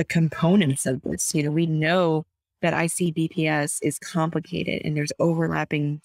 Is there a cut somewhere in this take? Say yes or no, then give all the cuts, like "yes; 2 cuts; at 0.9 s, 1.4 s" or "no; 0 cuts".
no; 0 cuts